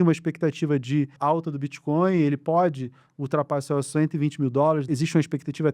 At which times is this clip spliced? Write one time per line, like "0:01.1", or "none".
0:01.1
0:04.8